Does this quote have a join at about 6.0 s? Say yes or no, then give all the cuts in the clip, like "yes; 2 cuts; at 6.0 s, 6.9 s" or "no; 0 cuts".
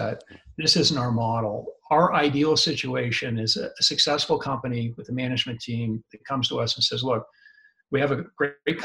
no; 0 cuts